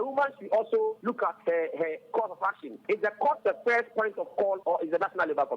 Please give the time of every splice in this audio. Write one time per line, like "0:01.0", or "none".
0:01.0
0:02.8
0:04.6